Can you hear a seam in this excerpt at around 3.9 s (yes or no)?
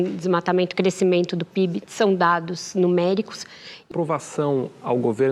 yes